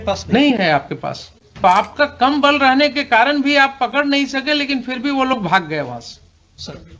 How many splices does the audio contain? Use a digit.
1